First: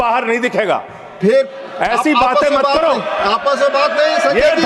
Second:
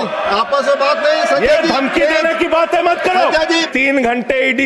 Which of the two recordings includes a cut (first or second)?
second